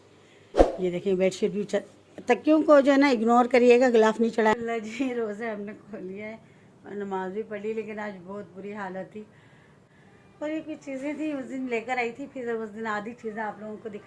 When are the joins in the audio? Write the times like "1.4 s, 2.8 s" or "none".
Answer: 4.5 s, 9.8 s